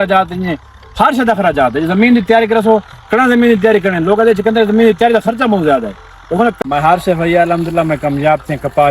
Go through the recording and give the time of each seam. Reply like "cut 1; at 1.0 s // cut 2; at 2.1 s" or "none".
cut 1; at 6.6 s